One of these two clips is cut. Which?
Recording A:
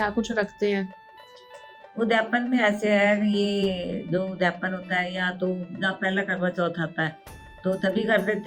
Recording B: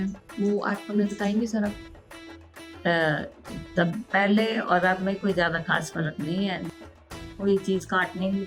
B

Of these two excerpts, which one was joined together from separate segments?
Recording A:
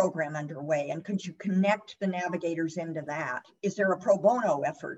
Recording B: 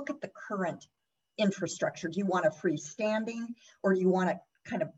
A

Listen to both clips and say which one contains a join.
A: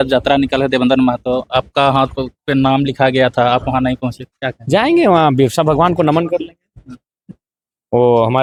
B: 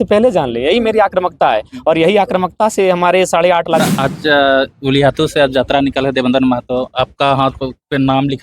B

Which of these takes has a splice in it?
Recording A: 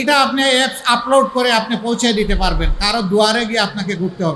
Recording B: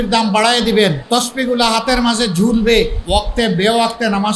B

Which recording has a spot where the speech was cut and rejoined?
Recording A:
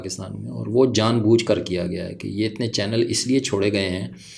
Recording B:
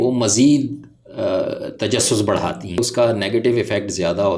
B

